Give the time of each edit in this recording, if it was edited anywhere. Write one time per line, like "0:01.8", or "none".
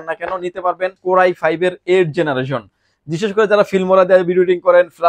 0:01.0